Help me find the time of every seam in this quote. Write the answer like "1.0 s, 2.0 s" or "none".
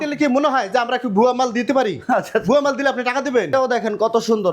3.5 s